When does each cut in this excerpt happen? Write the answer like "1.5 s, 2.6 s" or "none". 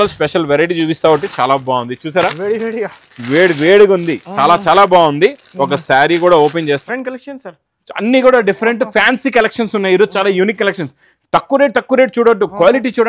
6.8 s